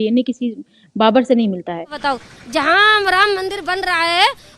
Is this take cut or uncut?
cut